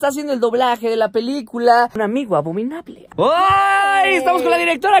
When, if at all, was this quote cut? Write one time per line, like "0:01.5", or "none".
0:03.1